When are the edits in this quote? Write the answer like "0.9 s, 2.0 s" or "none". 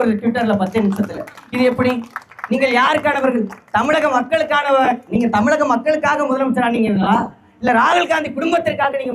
none